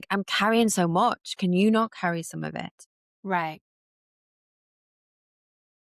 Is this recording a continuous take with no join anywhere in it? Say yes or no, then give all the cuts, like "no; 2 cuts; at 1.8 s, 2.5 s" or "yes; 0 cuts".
yes; 0 cuts